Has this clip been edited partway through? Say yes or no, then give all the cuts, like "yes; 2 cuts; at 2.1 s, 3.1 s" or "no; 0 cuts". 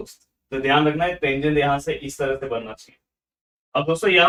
no; 0 cuts